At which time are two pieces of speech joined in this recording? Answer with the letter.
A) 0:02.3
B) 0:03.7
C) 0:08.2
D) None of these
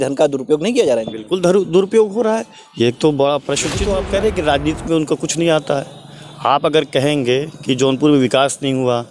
B